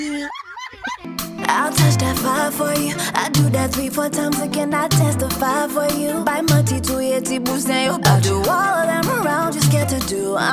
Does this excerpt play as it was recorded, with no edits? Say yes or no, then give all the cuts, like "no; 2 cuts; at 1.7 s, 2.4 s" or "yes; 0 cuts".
no; 1 cut; at 1.0 s